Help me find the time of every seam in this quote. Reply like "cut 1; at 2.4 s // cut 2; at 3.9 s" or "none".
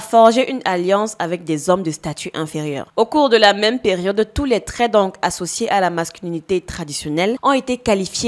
cut 1; at 2.8 s // cut 2; at 7.4 s